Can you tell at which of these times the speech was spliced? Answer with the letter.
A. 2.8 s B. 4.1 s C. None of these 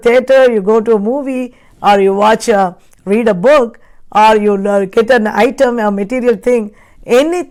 C